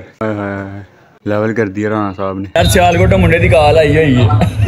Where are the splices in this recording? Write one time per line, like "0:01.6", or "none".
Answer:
0:02.6